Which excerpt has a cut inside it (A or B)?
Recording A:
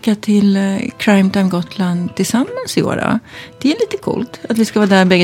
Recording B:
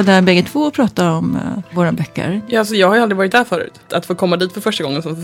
B